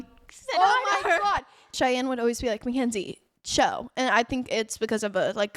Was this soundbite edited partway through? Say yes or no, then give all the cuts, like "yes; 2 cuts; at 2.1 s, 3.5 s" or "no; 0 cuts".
yes; 1 cut; at 1.7 s